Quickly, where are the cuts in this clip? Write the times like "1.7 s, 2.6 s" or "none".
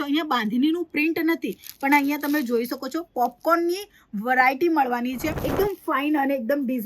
5.4 s